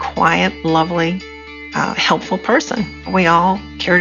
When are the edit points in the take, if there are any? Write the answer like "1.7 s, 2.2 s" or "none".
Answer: 3.1 s